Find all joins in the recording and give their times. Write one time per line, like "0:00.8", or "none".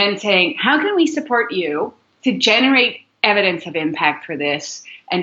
none

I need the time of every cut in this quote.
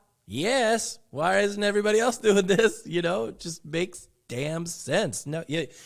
none

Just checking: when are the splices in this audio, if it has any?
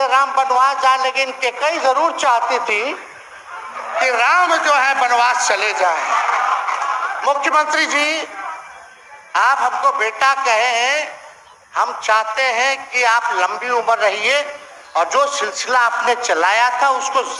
none

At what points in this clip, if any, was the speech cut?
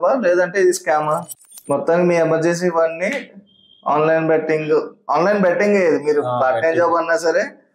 0:01.5

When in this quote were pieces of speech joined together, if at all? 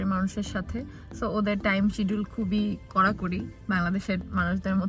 none

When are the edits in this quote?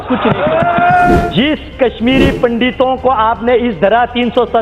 0:01.2

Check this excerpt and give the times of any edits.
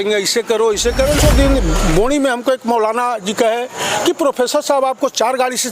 0:01.2

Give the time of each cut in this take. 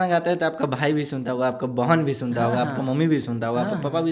none

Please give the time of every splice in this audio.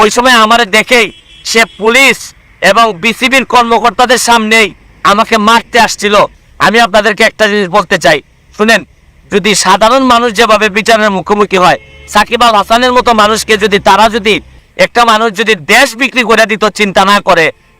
0:06.4
0:14.6

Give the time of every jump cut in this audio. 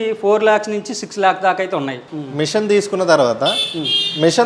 0:02.1

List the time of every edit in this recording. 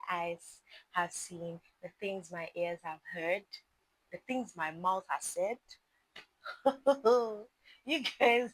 none

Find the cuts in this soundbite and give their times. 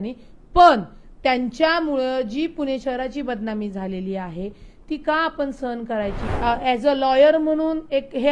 0:06.2

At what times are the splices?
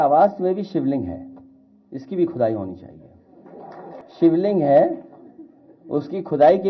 0:04.0

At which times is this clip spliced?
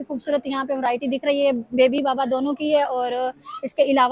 none

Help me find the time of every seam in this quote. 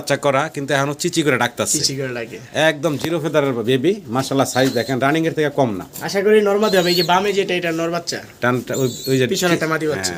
none

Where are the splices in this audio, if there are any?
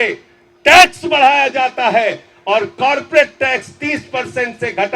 none

